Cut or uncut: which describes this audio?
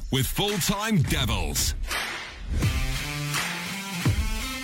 cut